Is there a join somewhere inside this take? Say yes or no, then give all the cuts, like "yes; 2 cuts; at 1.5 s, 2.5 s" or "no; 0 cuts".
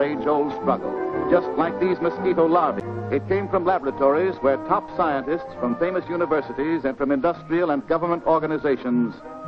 no; 0 cuts